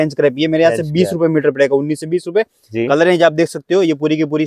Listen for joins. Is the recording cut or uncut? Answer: uncut